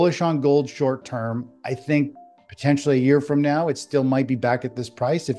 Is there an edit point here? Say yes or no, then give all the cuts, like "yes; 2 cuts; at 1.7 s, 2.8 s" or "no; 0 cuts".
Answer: no; 0 cuts